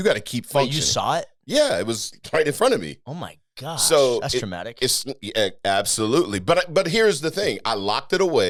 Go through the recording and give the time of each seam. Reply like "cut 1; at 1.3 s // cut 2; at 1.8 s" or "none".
none